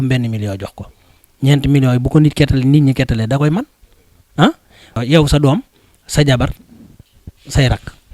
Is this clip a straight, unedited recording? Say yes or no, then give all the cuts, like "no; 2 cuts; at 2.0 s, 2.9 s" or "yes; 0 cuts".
no; 1 cut; at 5.0 s